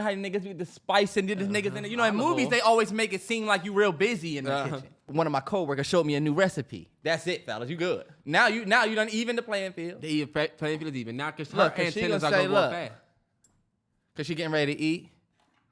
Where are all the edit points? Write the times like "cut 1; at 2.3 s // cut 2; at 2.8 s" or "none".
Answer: cut 1; at 5.0 s

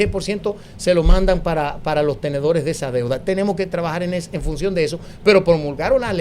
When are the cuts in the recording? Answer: none

